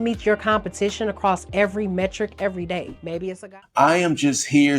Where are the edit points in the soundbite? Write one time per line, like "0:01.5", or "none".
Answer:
0:03.4